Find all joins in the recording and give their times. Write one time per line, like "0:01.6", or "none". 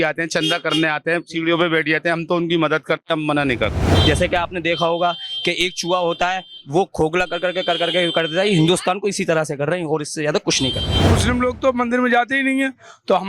0:03.9
0:11.0

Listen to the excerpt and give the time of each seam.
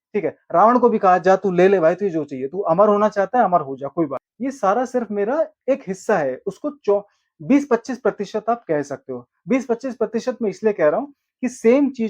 0:04.3

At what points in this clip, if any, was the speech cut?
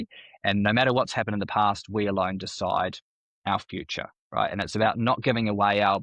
none

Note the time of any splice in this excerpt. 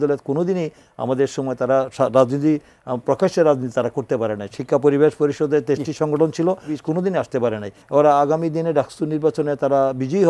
0:06.8
0:07.8

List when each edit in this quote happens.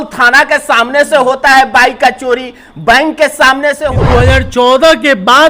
0:03.9

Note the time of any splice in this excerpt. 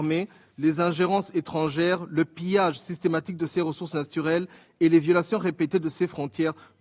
none

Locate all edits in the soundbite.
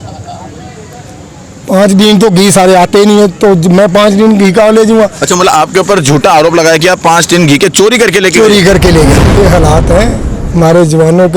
0:09.4

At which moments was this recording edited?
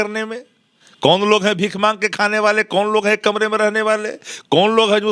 none

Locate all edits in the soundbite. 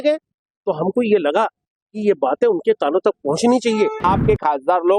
0:04.0

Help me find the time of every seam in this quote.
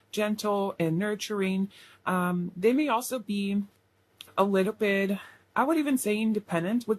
none

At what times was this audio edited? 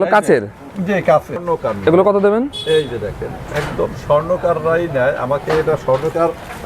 0:01.4

